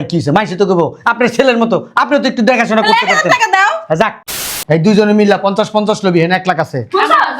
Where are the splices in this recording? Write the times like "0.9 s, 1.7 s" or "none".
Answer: 4.3 s